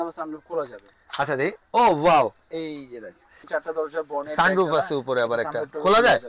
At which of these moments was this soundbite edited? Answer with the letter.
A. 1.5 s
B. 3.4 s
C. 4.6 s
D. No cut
B